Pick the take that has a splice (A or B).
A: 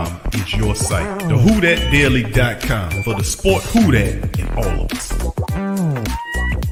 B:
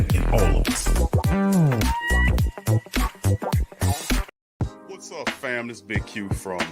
B